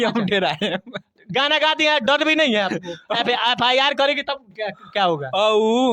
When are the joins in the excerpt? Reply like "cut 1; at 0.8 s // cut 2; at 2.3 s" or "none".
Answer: none